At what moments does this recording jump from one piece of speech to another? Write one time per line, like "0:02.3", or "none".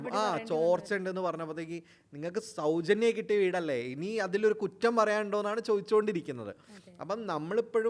none